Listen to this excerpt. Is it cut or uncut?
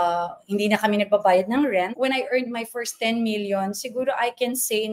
cut